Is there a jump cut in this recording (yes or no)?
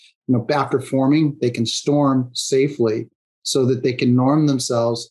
no